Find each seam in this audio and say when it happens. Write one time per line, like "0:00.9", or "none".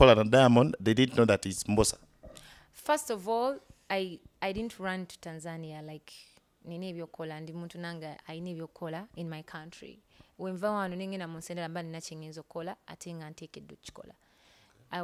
none